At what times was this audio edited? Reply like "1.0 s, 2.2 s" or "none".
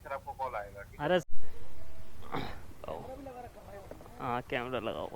1.2 s